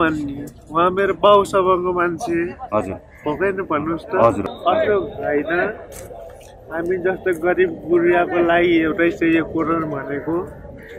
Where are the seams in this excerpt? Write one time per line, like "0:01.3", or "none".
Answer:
0:04.5